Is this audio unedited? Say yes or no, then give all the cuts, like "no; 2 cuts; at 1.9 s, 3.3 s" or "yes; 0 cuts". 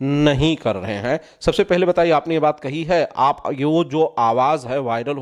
yes; 0 cuts